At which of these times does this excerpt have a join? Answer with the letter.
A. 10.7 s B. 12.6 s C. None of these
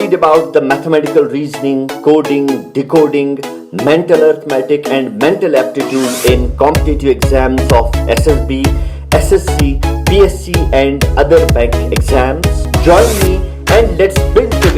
B